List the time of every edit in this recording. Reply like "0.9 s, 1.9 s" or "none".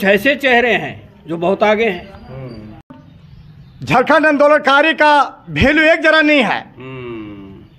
3.0 s